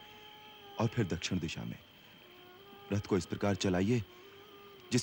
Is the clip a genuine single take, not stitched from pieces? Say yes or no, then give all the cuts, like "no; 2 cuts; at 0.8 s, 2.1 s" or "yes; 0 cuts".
yes; 0 cuts